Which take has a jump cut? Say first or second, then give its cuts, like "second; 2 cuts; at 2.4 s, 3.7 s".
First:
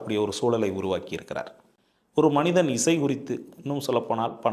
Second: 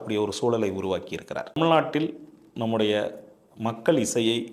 second; 1 cut; at 1.6 s